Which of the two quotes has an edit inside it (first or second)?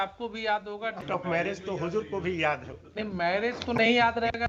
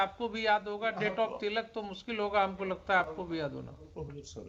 first